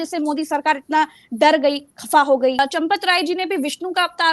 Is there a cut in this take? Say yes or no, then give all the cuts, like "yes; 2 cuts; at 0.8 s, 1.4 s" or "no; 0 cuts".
yes; 1 cut; at 2.6 s